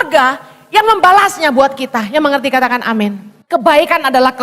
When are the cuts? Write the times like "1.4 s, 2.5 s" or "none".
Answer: 3.3 s